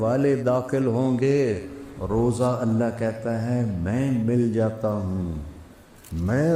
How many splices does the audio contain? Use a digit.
1